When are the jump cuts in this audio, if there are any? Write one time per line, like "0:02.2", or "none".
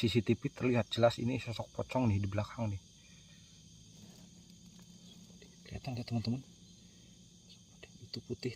0:04.0